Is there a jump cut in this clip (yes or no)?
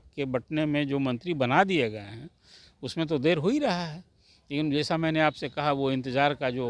no